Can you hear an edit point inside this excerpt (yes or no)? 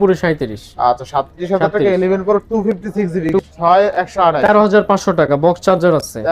yes